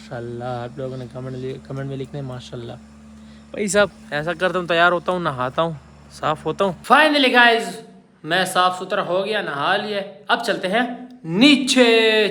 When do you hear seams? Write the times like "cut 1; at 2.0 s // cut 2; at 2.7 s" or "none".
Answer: none